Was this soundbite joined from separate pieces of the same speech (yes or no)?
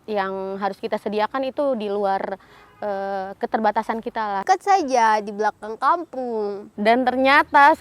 yes